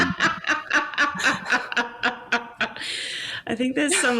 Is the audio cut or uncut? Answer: uncut